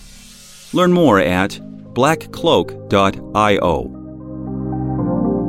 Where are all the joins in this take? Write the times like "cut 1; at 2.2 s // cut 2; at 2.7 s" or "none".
cut 1; at 4.3 s